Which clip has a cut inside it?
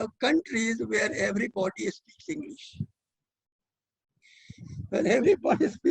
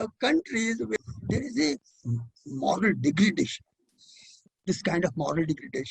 second; 1 cut; at 1.0 s

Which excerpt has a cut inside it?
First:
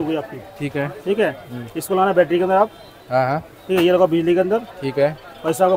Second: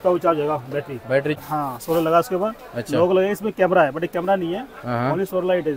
second; 1 cut; at 1.4 s

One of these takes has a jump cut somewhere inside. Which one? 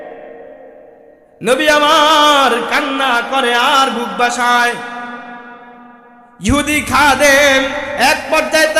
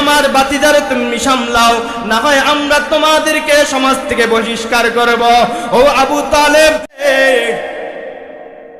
second; 1 cut; at 7.0 s

